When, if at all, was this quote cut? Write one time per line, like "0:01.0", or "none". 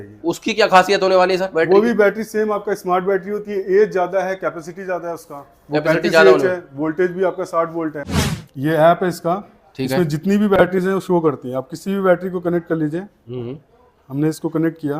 0:08.1